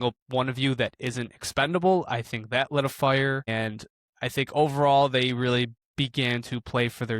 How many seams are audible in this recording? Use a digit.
1